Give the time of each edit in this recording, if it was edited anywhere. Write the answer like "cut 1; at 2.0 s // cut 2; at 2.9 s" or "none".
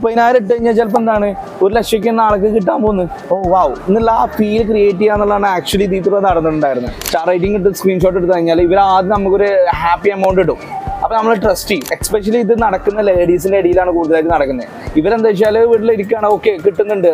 cut 1; at 3.2 s // cut 2; at 7.0 s // cut 3; at 12.0 s